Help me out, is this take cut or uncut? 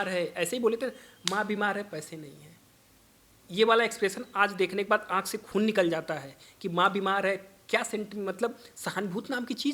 uncut